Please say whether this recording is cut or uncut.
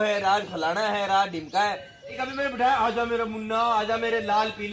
cut